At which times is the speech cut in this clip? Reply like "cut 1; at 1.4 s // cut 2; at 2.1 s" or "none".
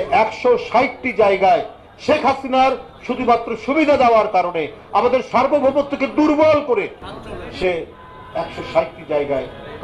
cut 1; at 7.1 s